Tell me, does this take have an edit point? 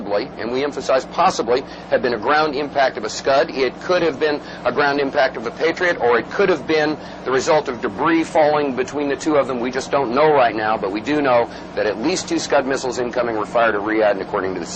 yes; 1 cut; at 13.7 s

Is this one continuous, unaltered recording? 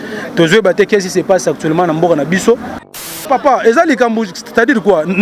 no; 1 cut; at 3.2 s

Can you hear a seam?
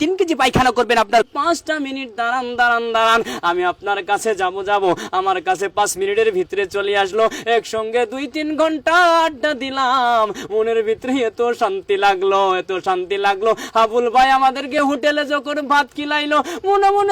yes; 1 cut; at 1.3 s

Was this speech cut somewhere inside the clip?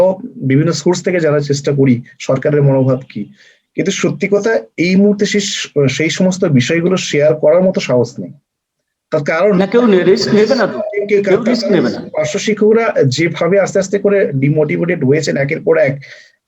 no; 0 cuts

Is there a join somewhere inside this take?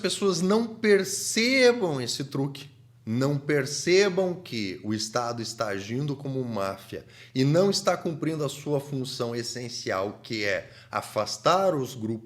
no; 0 cuts

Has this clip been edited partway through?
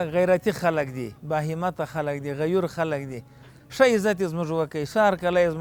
no; 0 cuts

